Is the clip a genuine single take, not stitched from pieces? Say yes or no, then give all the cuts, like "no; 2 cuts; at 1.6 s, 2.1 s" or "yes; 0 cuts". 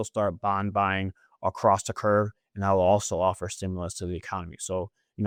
yes; 0 cuts